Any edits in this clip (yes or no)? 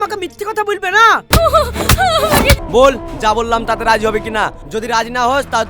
yes